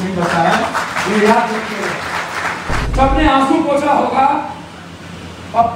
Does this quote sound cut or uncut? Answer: cut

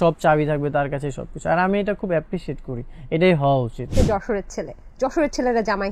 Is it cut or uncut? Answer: cut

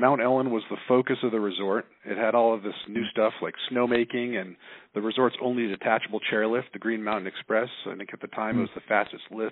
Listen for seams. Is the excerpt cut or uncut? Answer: uncut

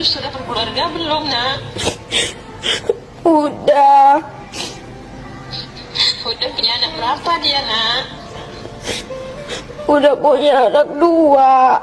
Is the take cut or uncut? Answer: uncut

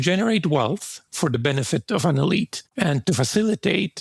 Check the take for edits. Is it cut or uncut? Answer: cut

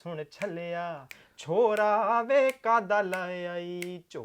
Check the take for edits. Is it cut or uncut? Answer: uncut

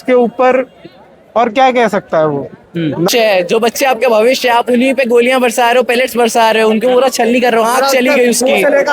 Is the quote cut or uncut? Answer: cut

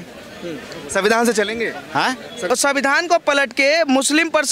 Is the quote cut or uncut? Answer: cut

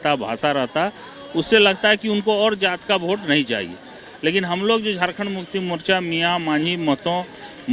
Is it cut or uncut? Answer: uncut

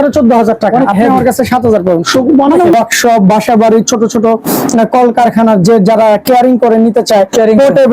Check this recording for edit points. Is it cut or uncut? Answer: cut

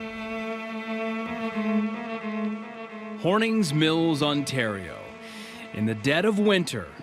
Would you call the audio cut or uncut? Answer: uncut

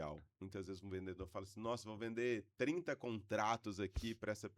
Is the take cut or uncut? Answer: uncut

